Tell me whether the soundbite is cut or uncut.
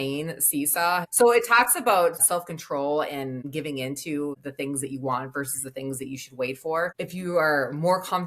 cut